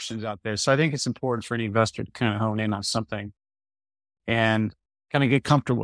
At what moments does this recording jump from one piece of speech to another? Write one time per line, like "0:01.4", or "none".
0:04.9